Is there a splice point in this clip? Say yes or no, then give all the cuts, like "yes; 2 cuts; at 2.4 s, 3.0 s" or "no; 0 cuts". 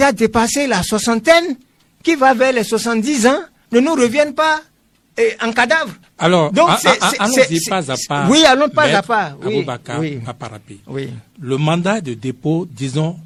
no; 0 cuts